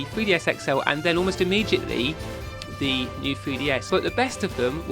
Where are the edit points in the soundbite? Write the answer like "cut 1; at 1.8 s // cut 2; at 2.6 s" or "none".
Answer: cut 1; at 3.9 s